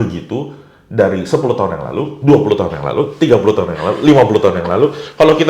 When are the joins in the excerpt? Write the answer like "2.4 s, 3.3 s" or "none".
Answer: none